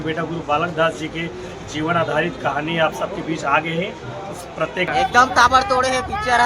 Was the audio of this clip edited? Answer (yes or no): yes